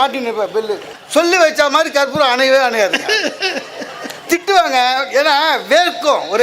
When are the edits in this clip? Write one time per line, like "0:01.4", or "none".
0:00.9